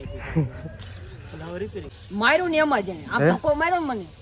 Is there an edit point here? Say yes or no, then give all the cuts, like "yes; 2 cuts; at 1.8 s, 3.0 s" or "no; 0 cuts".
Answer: yes; 1 cut; at 2.0 s